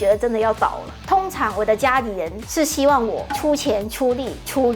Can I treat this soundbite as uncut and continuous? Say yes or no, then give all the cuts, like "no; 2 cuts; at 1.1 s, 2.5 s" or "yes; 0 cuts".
no; 1 cut; at 1.0 s